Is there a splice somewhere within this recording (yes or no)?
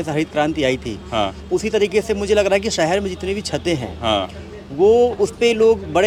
no